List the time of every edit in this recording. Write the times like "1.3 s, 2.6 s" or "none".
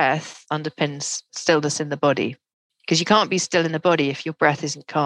none